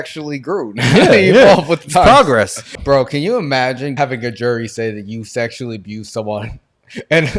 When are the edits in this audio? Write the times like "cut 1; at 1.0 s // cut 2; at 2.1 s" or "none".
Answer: cut 1; at 2.6 s // cut 2; at 4.0 s